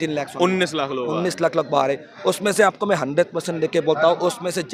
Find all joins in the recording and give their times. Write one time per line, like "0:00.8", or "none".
none